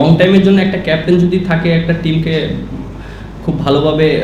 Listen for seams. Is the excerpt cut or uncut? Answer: uncut